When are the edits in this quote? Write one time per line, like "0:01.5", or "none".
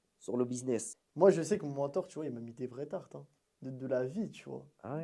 0:01.0